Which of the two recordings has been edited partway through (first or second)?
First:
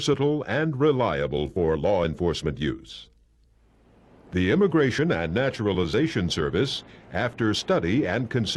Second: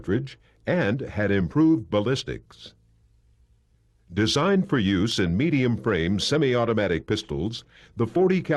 second